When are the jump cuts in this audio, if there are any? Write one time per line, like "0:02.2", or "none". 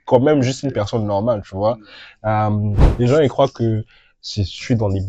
0:02.8